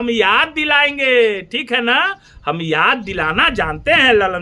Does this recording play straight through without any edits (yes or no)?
yes